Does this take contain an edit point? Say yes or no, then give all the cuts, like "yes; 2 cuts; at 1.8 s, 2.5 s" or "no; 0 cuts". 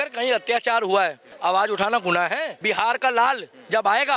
yes; 2 cuts; at 1.3 s, 2.5 s